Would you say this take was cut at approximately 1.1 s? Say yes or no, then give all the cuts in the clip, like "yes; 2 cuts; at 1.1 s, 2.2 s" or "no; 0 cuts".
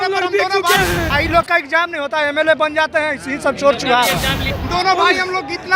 yes; 2 cuts; at 1.1 s, 4.5 s